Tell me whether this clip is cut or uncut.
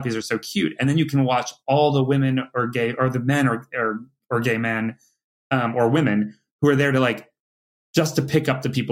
uncut